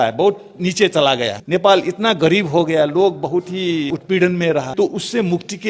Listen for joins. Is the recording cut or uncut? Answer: cut